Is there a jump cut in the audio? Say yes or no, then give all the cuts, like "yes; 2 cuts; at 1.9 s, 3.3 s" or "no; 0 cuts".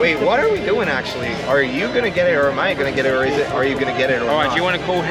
no; 0 cuts